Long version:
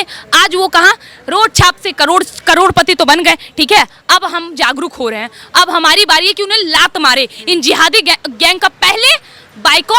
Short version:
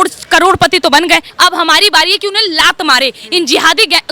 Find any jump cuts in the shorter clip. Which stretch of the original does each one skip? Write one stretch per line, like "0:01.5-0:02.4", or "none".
0:03.4-0:05.4